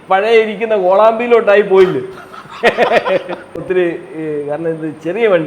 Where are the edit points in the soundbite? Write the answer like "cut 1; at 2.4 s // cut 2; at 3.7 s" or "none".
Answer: cut 1; at 3.6 s